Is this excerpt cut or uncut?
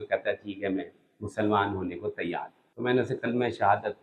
cut